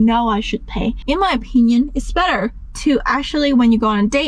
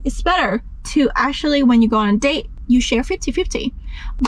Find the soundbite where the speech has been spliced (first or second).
first